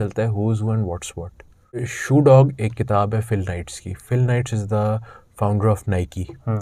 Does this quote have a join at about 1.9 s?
yes; 1 cut; at 1.9 s

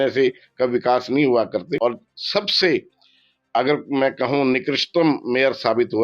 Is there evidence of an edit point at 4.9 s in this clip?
no; 1 cut; at 1.8 s

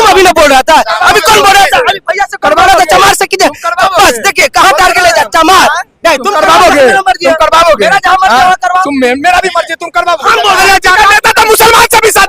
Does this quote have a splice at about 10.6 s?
yes; 1 cut; at 10.6 s

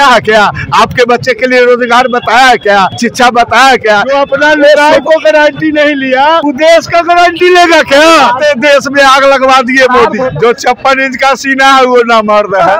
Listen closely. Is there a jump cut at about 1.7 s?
no; 5 cuts; at 3.0 s, 4.1 s, 6.4 s, 8.4 s, 10.3 s

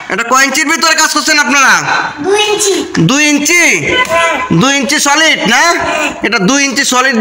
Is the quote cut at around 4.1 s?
no; 0 cuts

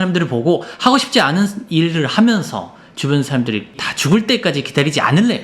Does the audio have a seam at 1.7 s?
no; 1 cut; at 3.9 s

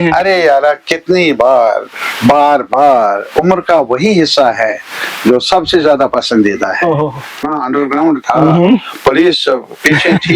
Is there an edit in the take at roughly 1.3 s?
no; 1 cut; at 7.5 s

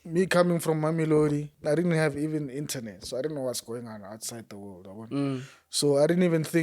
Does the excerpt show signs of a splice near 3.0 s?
no; 1 cut; at 1.6 s

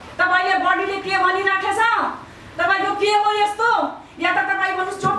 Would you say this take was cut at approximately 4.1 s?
no; 0 cuts

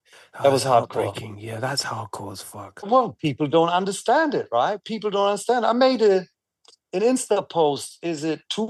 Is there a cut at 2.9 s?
yes; 1 cut; at 2.9 s

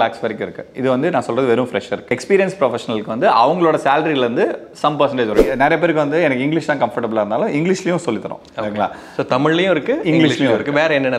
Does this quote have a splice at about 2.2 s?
yes; 2 cuts; at 2.2 s, 5.5 s

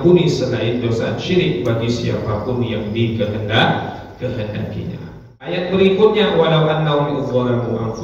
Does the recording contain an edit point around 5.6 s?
yes; 1 cut; at 5.6 s

